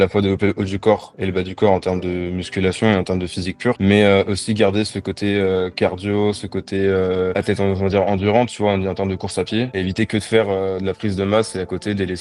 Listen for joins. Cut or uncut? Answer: uncut